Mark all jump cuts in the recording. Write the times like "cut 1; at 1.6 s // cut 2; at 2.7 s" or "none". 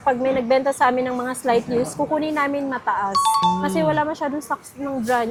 none